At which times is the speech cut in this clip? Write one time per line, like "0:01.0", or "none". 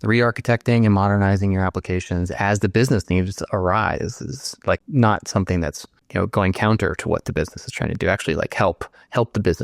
0:04.8
0:06.0